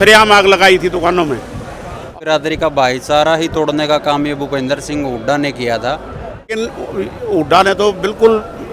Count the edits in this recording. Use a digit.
2